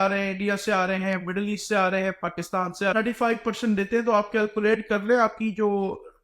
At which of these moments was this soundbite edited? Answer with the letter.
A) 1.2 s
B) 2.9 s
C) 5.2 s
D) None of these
B